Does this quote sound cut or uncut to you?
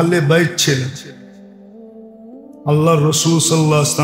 cut